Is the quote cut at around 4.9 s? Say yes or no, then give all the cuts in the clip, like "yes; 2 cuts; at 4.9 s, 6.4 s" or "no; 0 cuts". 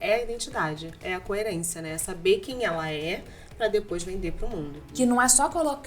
yes; 1 cut; at 4.9 s